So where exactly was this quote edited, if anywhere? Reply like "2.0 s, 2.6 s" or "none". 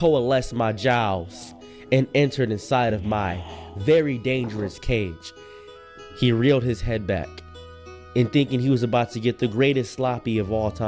none